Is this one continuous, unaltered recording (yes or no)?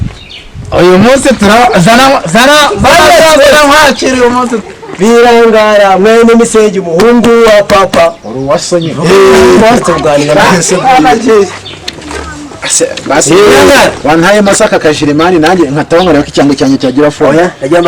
no